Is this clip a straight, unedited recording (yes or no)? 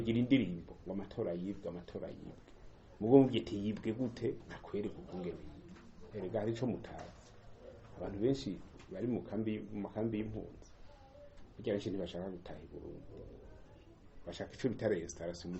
no